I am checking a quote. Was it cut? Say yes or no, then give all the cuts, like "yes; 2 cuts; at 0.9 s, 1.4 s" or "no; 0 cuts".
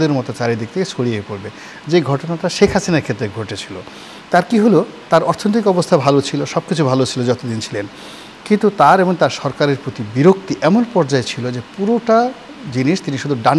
no; 0 cuts